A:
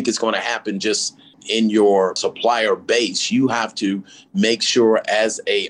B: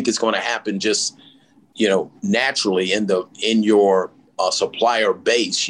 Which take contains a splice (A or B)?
A